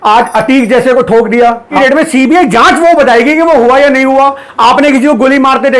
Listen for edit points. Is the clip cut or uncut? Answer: cut